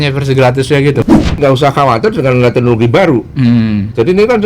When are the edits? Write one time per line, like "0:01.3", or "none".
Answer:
0:01.0